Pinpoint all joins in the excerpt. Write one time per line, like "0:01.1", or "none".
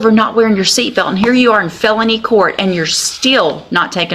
none